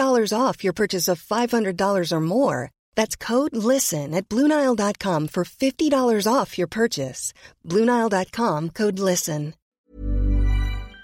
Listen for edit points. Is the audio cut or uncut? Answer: cut